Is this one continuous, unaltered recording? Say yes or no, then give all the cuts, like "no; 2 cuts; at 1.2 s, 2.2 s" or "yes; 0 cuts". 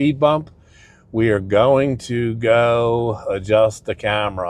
yes; 0 cuts